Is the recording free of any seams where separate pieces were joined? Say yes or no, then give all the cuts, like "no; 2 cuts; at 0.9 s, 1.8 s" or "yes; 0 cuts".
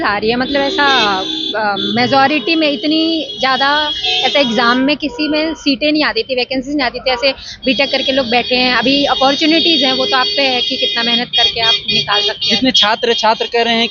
yes; 0 cuts